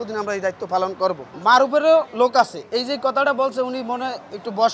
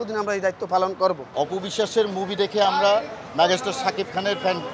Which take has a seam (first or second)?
second